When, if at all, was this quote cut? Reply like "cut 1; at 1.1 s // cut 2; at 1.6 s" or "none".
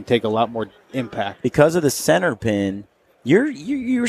cut 1; at 1.3 s